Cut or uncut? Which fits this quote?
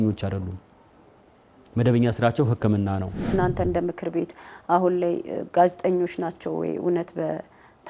cut